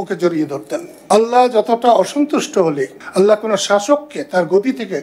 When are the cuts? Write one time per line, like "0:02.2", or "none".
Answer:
0:00.9
0:02.9